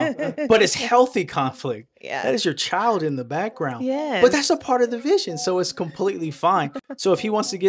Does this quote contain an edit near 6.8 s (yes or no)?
no